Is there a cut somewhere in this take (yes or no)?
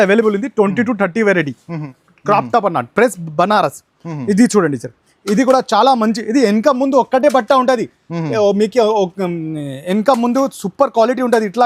yes